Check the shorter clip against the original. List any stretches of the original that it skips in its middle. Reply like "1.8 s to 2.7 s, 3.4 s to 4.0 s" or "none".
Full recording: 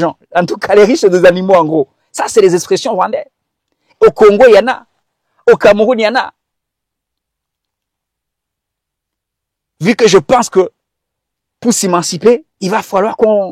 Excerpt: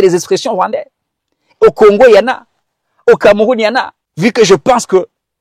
6.4 s to 9.6 s